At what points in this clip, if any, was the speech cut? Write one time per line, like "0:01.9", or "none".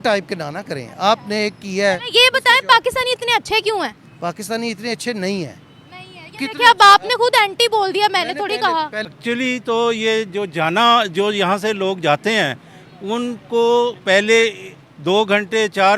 0:09.1

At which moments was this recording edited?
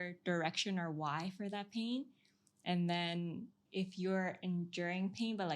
0:03.6

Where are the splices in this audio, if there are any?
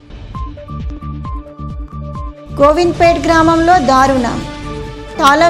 0:01.0

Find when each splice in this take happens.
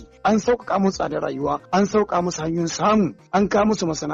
0:01.6
0:03.2

